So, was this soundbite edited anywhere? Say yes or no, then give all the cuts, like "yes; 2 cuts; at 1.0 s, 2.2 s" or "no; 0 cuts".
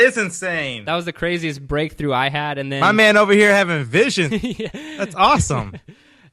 yes; 1 cut; at 4.5 s